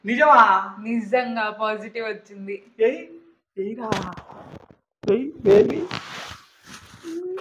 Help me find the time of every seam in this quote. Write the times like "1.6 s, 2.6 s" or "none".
none

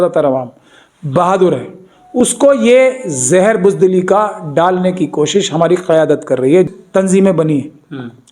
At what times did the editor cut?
6.7 s

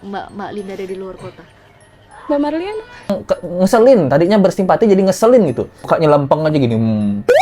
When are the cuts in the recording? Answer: 3.1 s, 5.9 s

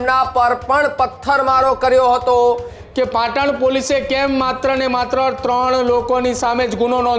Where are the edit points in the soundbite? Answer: 2.8 s

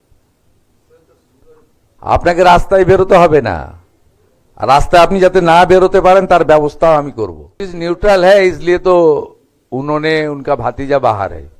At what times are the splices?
7.7 s

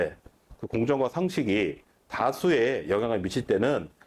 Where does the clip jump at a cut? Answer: none

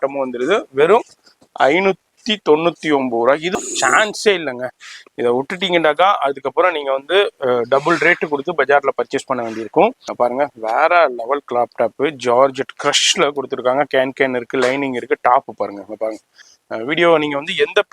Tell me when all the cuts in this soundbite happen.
3.5 s, 10.0 s, 16.4 s

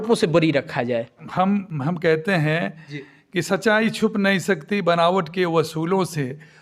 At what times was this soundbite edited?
1.2 s

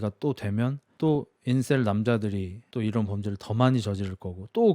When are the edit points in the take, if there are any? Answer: 0.8 s, 2.6 s

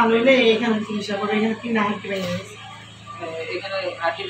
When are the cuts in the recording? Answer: none

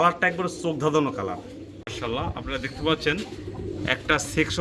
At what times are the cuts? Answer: 1.8 s

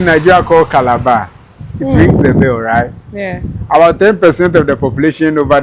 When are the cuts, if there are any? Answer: none

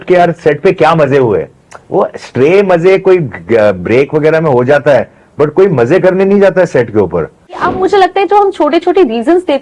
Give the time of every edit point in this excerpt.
7.6 s

